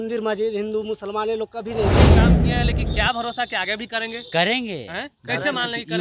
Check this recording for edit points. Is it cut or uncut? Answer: cut